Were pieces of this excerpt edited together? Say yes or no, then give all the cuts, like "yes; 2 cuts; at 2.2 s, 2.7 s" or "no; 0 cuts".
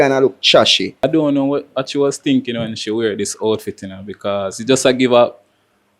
yes; 1 cut; at 1.0 s